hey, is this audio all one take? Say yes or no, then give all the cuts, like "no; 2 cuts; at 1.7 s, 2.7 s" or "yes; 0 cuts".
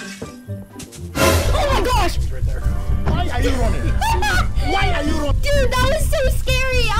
yes; 0 cuts